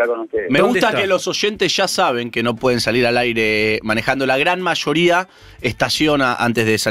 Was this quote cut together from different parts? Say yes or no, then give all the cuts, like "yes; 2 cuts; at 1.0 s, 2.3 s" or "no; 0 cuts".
yes; 1 cut; at 4.2 s